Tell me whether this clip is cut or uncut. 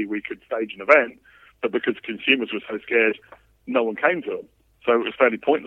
uncut